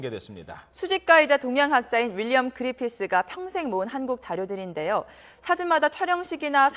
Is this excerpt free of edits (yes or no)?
no